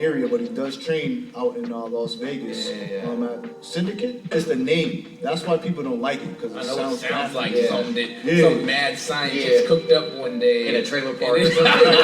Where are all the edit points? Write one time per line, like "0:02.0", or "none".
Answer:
0:04.3

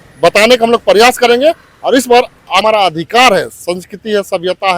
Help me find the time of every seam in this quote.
0:02.6

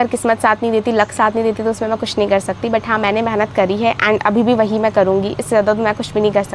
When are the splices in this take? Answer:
none

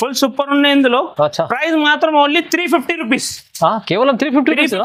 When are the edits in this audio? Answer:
none

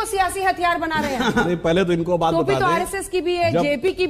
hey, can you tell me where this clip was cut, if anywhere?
none

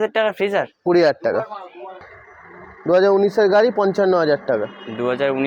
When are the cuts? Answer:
0:02.1

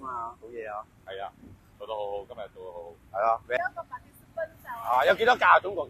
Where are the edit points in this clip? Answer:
0:03.6

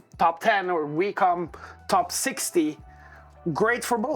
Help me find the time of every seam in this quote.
none

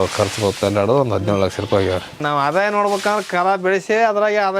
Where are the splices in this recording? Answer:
0:02.2

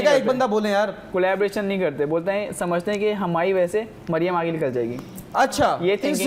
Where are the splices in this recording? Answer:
none

